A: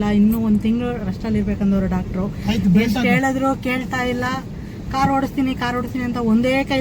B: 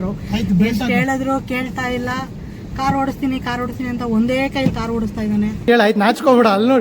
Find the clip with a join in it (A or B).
B